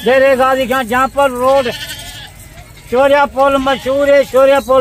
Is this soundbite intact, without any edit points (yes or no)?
yes